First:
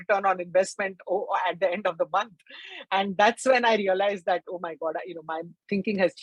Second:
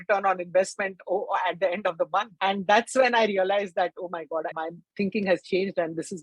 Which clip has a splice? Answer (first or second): second